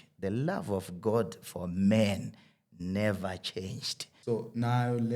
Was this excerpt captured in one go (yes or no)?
no